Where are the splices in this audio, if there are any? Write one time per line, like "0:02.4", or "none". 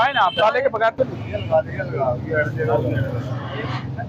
none